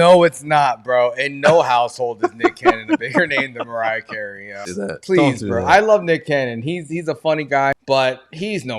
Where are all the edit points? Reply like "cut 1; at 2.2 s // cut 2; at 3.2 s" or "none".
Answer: cut 1; at 4.7 s // cut 2; at 7.7 s

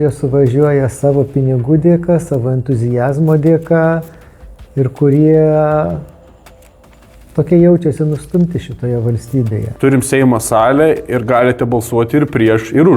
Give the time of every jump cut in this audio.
cut 1; at 9.7 s

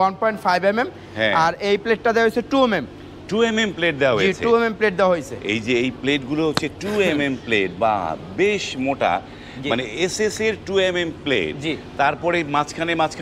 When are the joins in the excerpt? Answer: none

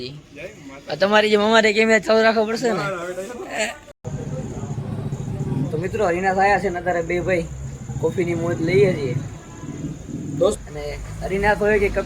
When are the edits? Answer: cut 1; at 4.0 s // cut 2; at 10.6 s

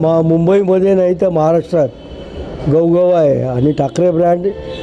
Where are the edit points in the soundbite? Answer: none

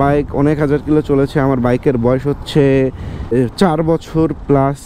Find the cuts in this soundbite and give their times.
cut 1; at 3.3 s

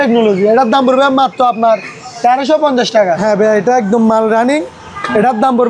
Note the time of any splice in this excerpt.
cut 1; at 3.2 s

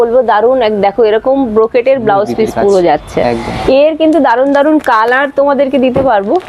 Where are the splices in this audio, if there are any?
cut 1; at 3.5 s

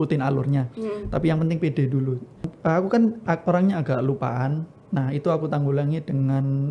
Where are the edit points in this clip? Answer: cut 1; at 2.5 s

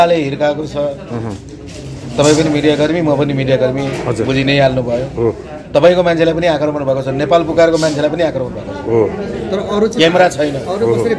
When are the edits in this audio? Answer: none

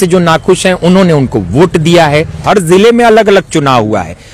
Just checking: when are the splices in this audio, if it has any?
cut 1; at 2.4 s

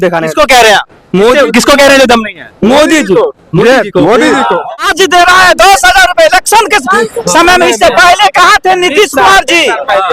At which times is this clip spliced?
cut 1; at 4.7 s

